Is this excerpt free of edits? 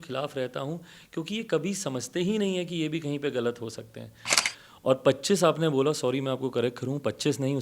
no; 1 cut; at 4.3 s

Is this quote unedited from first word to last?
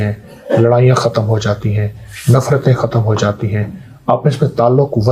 yes; 0 cuts

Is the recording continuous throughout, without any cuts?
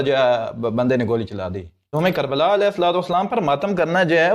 no; 1 cut; at 1.9 s

